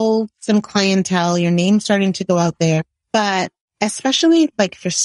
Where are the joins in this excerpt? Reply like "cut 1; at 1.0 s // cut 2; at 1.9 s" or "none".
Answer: cut 1; at 3.0 s